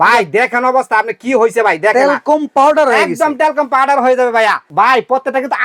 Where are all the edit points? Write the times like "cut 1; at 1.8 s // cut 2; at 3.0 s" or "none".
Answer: cut 1; at 4.7 s